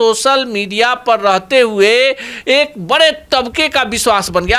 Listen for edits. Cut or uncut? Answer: uncut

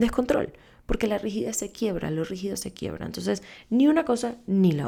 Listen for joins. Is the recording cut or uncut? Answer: uncut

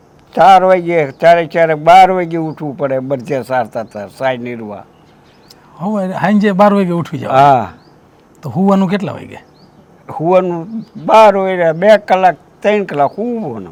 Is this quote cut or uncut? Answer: uncut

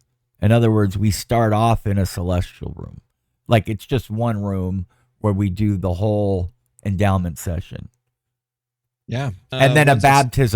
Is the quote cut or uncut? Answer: cut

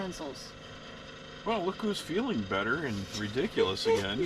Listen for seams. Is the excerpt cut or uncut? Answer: cut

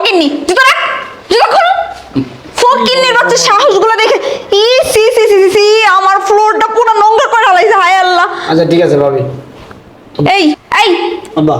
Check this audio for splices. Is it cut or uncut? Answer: cut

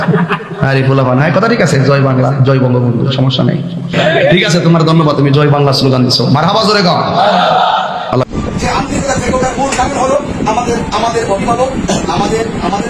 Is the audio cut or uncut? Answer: uncut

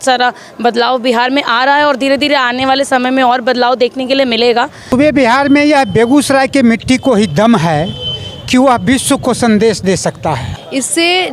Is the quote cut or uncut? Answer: cut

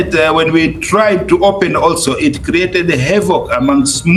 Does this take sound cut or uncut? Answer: uncut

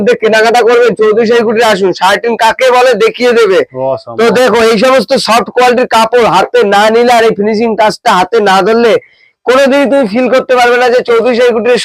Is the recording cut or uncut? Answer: uncut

